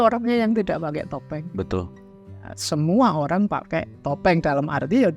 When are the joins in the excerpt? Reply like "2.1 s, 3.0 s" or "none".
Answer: none